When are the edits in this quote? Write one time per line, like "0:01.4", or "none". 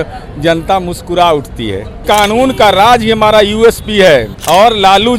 0:02.0
0:04.3

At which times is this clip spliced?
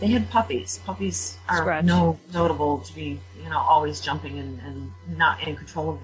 0:04.6

